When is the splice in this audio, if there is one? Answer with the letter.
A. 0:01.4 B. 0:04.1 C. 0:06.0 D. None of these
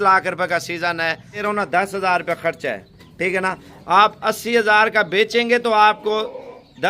A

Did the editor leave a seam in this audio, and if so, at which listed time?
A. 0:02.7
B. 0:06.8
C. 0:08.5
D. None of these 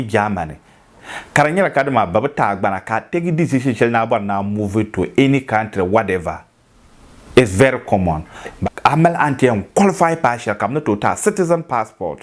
C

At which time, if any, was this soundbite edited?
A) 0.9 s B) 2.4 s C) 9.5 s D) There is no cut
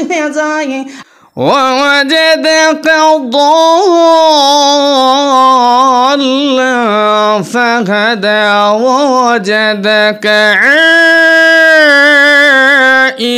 A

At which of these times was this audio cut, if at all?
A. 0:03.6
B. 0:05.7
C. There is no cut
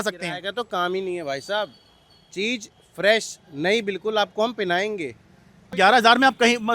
B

